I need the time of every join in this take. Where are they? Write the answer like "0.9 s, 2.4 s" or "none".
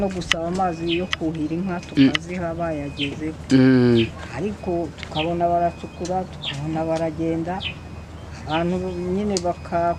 none